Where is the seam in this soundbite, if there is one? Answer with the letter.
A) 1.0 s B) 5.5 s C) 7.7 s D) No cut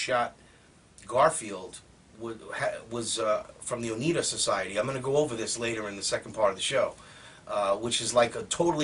B